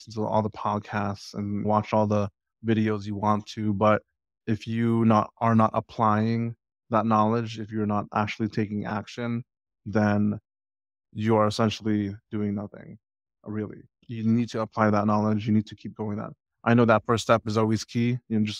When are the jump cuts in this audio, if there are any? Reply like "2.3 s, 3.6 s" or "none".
none